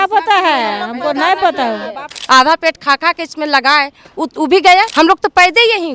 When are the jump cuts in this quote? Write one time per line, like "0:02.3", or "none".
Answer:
0:02.1
0:04.9

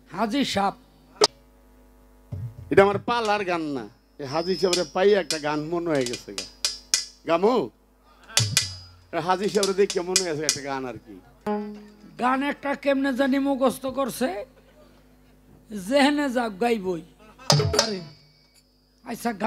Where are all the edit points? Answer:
0:01.3
0:11.4

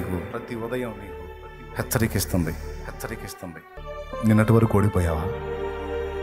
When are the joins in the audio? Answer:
0:03.8

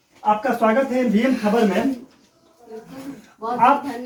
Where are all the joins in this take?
none

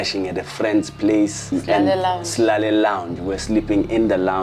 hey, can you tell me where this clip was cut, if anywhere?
0:01.5

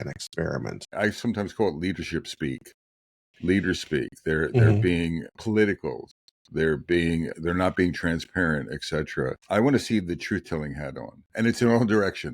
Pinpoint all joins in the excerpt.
0:00.9
0:05.3
0:07.3
0:09.4

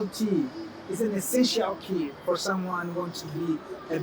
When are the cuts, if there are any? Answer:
none

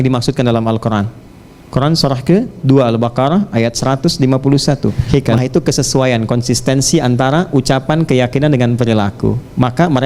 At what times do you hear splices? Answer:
0:05.0

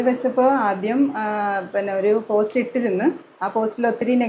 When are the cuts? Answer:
none

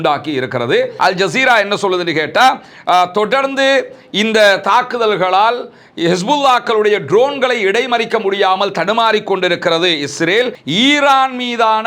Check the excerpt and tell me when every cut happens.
0:00.9
0:10.6

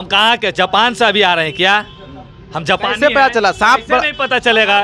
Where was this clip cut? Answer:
none

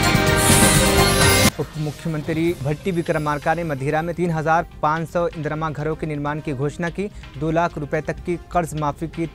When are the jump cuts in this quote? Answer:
0:01.4

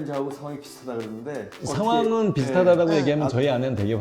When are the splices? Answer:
0:01.5

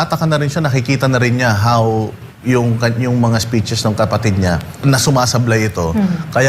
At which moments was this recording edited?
0:04.8

